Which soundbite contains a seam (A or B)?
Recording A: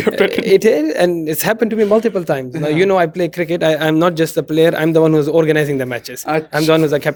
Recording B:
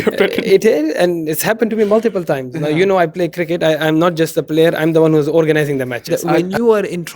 B